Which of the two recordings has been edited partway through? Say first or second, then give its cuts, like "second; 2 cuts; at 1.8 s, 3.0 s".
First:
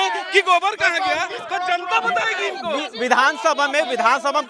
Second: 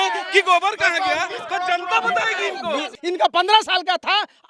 second; 1 cut; at 2.9 s